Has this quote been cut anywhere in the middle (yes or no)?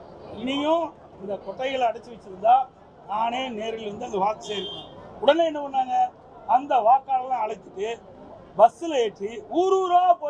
no